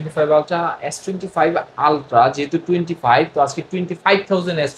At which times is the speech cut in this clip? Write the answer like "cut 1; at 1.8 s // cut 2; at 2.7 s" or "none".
none